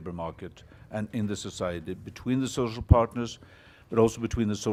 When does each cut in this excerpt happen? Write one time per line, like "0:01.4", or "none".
none